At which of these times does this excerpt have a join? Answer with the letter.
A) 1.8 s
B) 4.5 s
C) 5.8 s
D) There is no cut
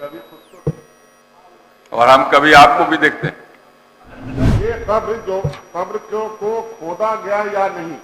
B